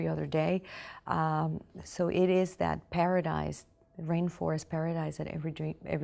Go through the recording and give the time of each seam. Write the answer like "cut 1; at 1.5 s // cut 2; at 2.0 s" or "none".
cut 1; at 1.9 s